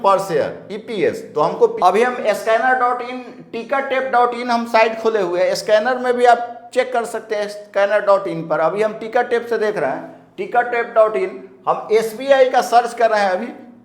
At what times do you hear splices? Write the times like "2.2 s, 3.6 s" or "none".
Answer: 1.8 s